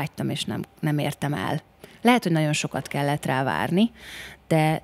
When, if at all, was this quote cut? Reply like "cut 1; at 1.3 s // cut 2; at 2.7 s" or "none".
none

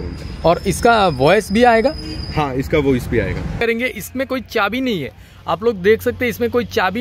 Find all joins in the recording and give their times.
cut 1; at 3.5 s

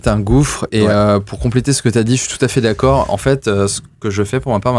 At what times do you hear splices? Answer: none

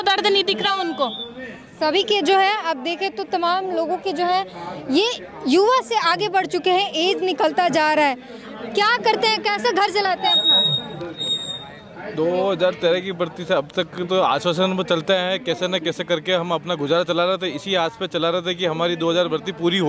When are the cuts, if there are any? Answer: none

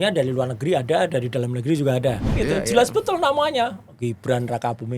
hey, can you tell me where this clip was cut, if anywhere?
cut 1; at 2.3 s

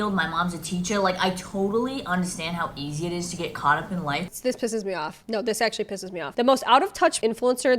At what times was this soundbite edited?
cut 1; at 4.3 s

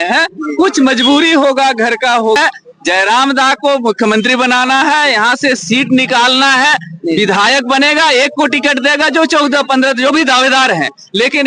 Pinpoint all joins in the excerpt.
cut 1; at 2.4 s

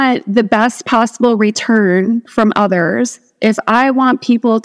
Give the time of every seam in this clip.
none

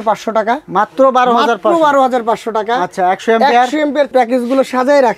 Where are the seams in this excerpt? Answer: cut 1; at 4.1 s

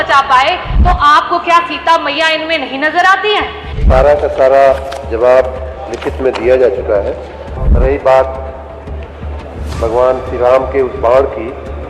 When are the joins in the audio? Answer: cut 1; at 3.7 s // cut 2; at 7.6 s

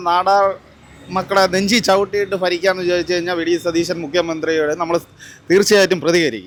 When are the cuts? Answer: none

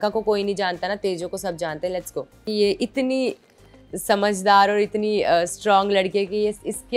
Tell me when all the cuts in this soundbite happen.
cut 1; at 2.5 s

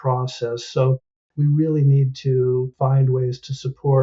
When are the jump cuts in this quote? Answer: cut 1; at 2.7 s

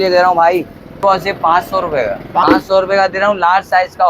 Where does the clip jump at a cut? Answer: cut 1; at 1.0 s // cut 2; at 2.4 s

